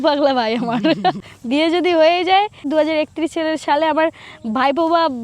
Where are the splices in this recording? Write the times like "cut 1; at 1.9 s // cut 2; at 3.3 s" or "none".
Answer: cut 1; at 1.3 s // cut 2; at 2.7 s